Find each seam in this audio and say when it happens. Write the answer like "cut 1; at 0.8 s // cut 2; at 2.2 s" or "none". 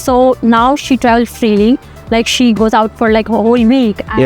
cut 1; at 2.5 s